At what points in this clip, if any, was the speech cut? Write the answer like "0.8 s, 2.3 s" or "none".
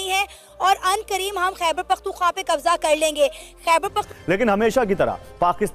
4.1 s